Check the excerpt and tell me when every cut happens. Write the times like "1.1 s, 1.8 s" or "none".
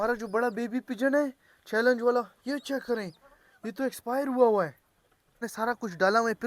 5.5 s